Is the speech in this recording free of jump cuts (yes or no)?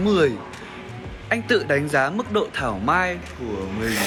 yes